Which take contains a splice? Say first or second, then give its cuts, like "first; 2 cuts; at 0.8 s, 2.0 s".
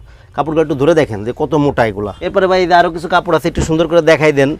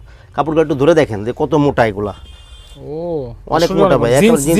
first; 1 cut; at 2.1 s